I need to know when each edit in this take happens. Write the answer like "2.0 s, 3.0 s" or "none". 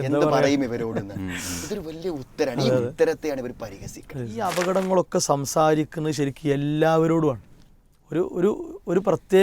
4.4 s